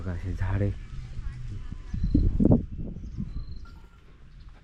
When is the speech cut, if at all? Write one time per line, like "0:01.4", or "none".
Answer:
none